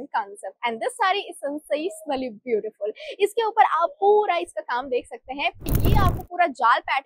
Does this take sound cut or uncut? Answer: cut